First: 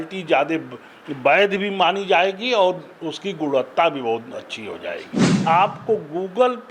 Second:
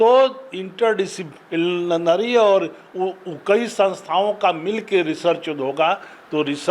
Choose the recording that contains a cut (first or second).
first